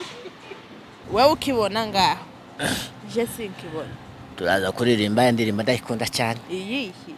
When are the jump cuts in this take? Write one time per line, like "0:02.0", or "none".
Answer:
0:01.0